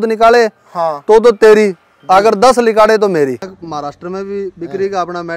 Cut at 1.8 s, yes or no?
no